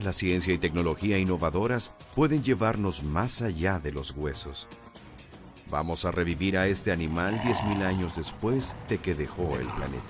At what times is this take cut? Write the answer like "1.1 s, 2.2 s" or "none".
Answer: 1.4 s